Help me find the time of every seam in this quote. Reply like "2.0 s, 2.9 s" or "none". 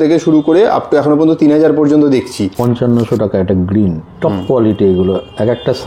2.5 s